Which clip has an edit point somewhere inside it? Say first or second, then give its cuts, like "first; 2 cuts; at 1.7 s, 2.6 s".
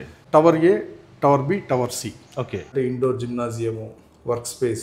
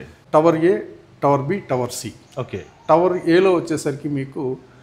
first; 1 cut; at 2.7 s